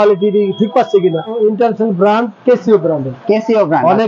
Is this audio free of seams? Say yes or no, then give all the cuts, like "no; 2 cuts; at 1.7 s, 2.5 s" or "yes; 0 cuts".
no; 1 cut; at 1.3 s